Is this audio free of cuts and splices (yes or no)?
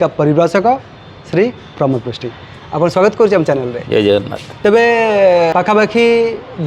no